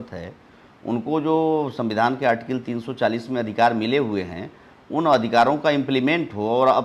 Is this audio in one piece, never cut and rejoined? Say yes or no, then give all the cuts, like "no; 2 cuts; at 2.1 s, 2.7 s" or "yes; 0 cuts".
yes; 0 cuts